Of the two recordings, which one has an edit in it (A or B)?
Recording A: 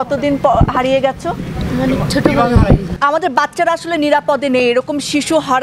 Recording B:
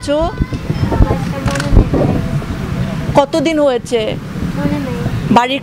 A